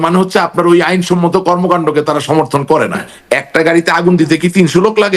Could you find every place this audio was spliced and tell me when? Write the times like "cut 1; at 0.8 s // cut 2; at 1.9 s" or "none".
cut 1; at 3.1 s